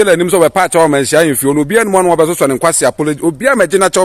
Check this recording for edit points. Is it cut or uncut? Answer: uncut